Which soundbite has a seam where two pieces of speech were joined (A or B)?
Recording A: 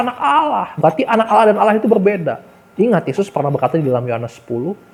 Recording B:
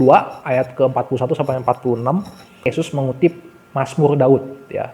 B